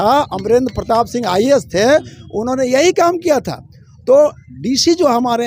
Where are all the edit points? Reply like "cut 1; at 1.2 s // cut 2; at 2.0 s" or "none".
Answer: none